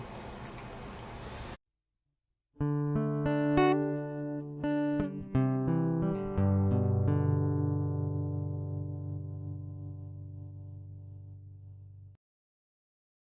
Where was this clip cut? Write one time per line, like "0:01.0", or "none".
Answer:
none